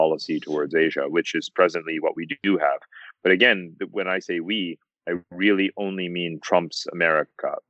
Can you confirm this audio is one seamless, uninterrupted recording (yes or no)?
yes